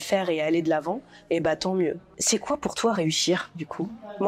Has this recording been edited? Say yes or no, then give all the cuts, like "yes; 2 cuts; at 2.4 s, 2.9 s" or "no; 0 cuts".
yes; 1 cut; at 2.1 s